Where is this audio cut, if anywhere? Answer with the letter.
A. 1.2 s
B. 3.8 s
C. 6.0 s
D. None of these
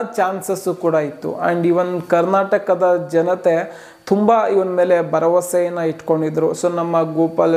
D